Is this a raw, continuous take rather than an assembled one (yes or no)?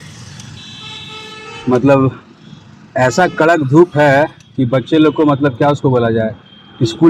yes